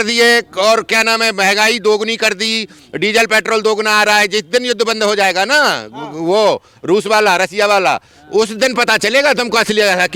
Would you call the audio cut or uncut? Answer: uncut